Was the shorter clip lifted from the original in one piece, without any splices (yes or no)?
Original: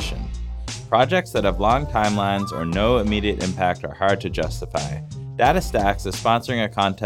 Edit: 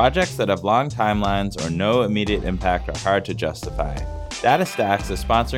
yes